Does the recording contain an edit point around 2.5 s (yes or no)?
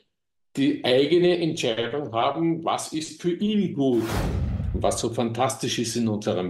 no